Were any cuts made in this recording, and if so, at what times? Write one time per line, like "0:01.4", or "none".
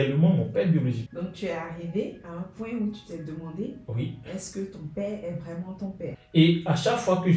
0:01.0
0:06.1